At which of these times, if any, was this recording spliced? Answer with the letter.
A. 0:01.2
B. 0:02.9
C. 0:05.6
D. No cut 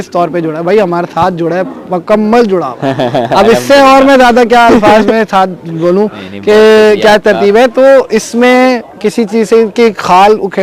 D